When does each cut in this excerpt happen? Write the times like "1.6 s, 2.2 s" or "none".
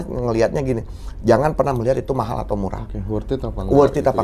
none